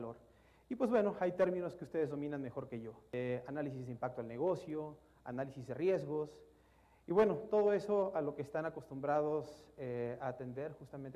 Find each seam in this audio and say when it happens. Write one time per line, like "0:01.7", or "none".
none